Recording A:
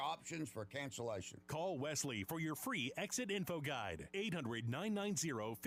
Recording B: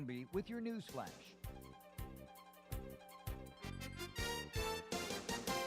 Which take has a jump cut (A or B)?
B